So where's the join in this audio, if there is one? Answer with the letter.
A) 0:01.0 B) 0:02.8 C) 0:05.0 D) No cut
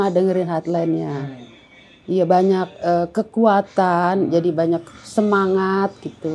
D